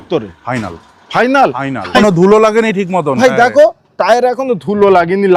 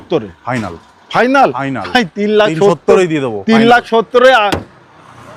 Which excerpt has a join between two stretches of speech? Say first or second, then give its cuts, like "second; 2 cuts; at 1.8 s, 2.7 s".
first; 1 cut; at 2.0 s